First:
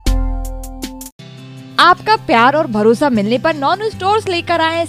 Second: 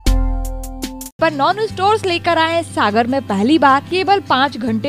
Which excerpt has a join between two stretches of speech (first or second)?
second